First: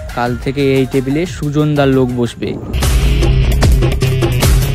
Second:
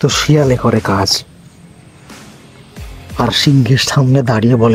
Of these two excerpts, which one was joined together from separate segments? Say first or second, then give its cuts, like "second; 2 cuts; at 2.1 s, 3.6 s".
first; 1 cut; at 2.7 s